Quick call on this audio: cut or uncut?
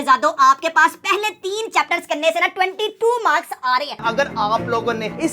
cut